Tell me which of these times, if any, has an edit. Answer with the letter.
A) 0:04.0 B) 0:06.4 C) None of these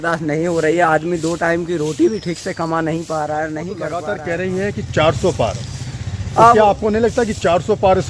A